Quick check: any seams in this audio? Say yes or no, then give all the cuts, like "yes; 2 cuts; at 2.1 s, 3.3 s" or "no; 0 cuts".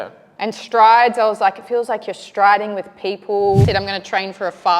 yes; 1 cut; at 3.6 s